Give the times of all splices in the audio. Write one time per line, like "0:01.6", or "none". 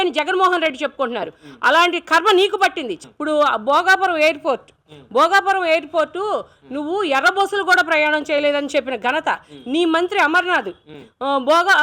0:03.0